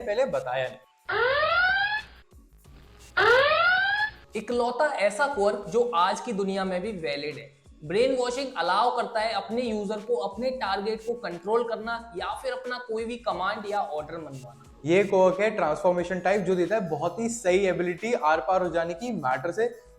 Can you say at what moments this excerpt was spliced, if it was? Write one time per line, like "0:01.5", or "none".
0:04.3
0:14.8